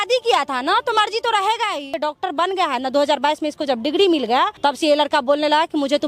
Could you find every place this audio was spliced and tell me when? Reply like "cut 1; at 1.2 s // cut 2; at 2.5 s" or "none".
cut 1; at 2.0 s // cut 2; at 4.5 s